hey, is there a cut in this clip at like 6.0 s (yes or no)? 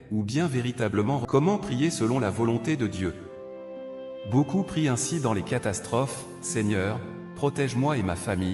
no